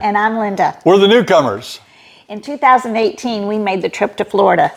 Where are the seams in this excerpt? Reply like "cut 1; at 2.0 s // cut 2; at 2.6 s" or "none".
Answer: none